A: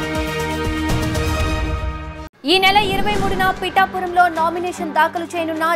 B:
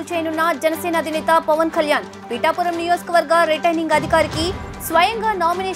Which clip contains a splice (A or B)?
A